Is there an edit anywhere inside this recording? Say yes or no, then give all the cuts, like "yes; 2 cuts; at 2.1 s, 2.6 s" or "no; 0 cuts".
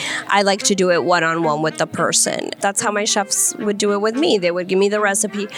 yes; 1 cut; at 2.6 s